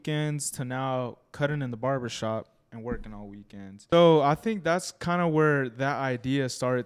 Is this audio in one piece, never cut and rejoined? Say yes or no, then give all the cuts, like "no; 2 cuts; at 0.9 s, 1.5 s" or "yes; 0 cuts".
no; 1 cut; at 3.8 s